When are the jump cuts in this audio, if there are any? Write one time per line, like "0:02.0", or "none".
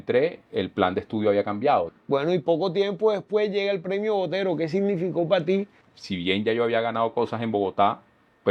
0:02.0
0:05.8